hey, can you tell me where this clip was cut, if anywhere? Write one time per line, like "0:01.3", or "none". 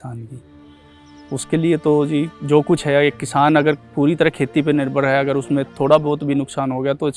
none

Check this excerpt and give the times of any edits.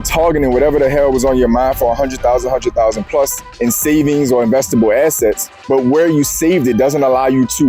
none

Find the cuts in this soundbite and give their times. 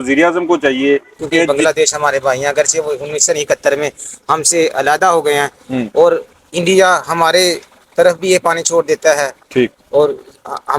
0:01.5

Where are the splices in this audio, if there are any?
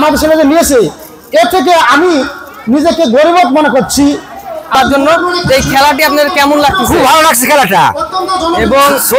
0:04.8

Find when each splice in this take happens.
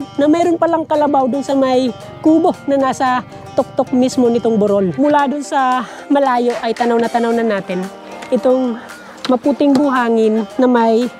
0:04.9

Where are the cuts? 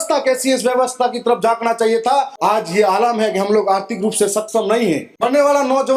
0:02.3
0:05.1

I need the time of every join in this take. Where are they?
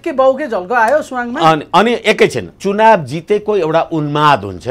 0:02.6

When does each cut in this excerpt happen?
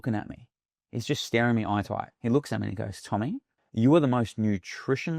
0:02.1
0:03.5

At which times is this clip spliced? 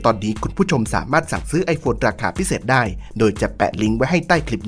none

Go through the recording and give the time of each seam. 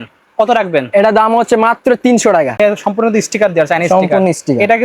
0:02.6

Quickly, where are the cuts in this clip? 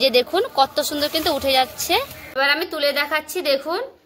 0:02.2

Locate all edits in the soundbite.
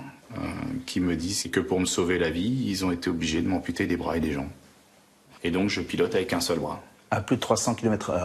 0:01.4
0:05.2

